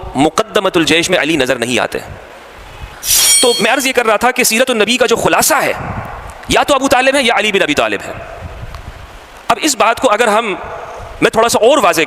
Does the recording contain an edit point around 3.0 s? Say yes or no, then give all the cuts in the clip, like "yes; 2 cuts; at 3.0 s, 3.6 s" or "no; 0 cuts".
yes; 1 cut; at 3.0 s